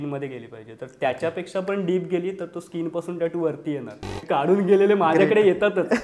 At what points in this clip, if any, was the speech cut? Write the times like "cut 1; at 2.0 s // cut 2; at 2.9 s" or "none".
cut 1; at 4.2 s